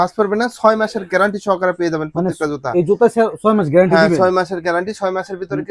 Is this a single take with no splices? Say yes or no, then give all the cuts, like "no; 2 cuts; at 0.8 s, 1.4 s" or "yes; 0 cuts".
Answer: yes; 0 cuts